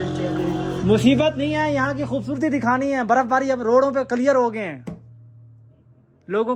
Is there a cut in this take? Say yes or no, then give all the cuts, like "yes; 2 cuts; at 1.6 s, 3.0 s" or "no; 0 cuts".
no; 0 cuts